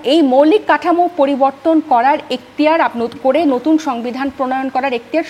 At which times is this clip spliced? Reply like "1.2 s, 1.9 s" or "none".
none

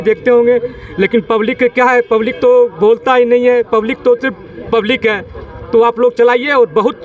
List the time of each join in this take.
none

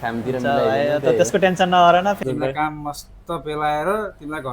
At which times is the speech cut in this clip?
2.2 s

